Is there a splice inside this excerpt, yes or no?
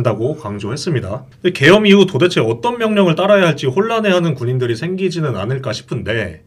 yes